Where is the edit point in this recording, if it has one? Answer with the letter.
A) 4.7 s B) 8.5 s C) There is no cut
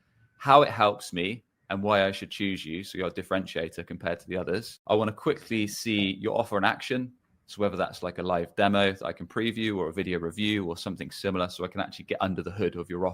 A